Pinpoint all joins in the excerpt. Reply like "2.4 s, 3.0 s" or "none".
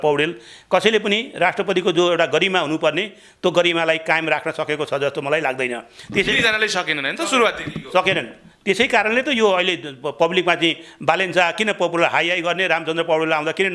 none